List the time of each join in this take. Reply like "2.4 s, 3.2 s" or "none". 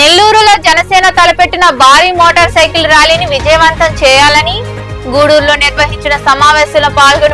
none